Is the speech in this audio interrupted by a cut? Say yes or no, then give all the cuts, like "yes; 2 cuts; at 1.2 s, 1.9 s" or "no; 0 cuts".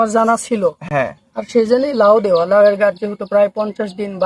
no; 0 cuts